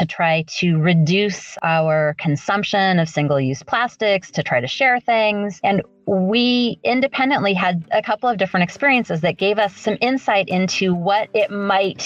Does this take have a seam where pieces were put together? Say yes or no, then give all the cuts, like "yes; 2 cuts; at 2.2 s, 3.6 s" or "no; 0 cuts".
yes; 2 cuts; at 7.8 s, 9.7 s